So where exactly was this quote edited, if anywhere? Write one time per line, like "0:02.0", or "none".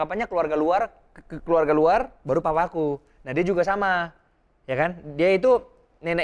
none